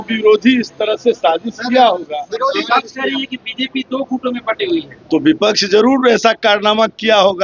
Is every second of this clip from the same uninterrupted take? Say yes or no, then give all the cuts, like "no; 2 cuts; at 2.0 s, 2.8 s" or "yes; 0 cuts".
yes; 0 cuts